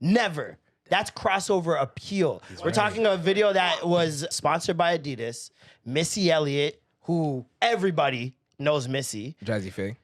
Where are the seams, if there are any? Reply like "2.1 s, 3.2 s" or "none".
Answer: 4.3 s